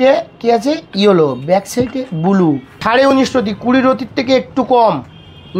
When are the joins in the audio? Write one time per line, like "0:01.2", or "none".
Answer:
0:02.8